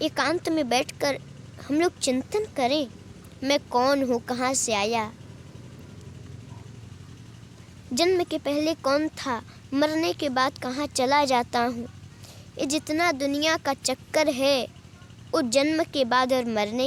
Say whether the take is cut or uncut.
uncut